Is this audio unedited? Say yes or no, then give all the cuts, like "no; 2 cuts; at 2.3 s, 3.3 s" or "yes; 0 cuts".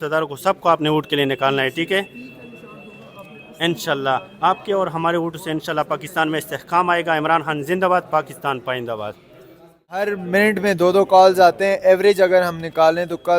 no; 1 cut; at 10.0 s